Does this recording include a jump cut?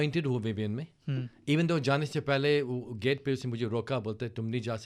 no; 0 cuts

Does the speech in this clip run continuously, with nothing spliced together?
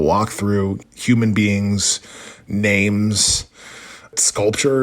yes; 0 cuts

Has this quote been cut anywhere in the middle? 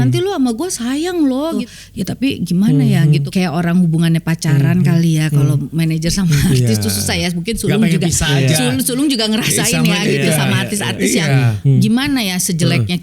yes; 2 cuts; at 1.6 s, 3.3 s

